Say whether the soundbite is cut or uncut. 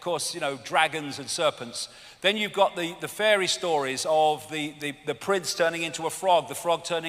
uncut